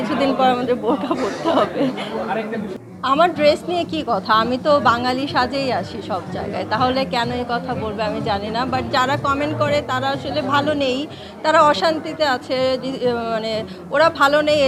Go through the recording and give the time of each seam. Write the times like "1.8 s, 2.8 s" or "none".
none

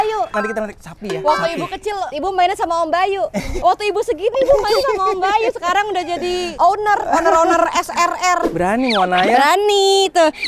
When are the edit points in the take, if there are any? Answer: 3.5 s, 8.5 s

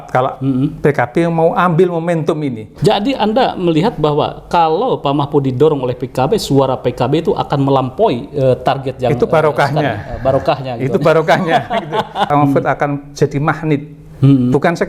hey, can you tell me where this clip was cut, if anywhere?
2.6 s, 12.3 s

